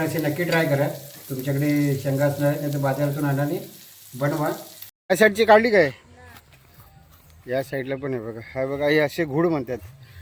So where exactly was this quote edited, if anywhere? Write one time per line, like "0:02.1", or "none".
0:05.0